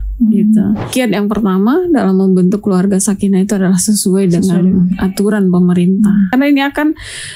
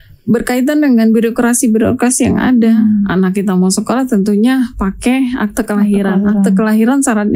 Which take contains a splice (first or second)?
first